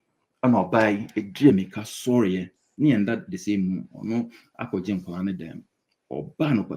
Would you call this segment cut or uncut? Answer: uncut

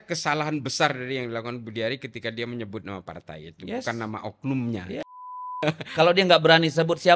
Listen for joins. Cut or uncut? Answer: cut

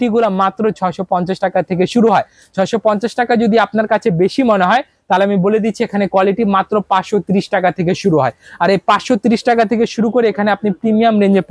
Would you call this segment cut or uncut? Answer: uncut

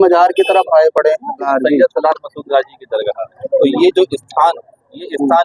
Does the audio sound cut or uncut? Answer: cut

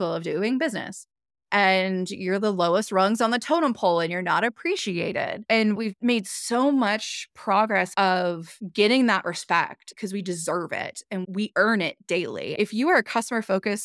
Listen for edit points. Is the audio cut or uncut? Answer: uncut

